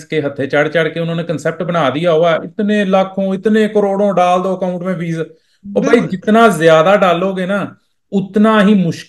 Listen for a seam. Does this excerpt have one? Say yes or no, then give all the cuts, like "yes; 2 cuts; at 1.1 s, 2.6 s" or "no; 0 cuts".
no; 0 cuts